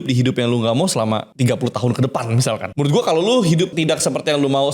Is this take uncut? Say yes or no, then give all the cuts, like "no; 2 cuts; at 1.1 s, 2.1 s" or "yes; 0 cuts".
no; 3 cuts; at 1.3 s, 2.7 s, 3.8 s